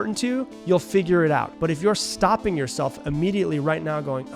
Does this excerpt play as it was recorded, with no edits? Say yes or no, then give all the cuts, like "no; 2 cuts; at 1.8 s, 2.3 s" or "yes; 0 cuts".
no; 1 cut; at 1.5 s